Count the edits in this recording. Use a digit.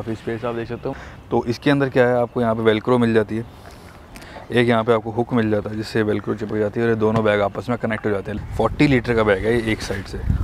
2